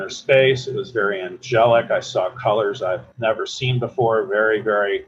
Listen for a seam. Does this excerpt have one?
no; 0 cuts

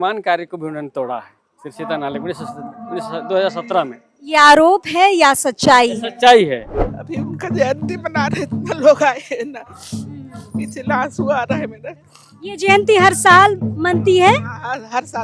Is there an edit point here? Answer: yes; 1 cut; at 6.7 s

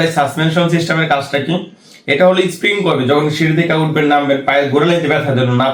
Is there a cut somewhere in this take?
no; 0 cuts

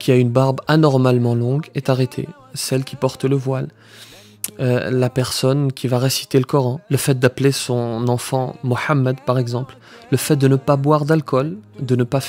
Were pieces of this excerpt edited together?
no; 0 cuts

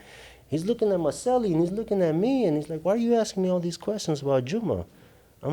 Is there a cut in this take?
no; 0 cuts

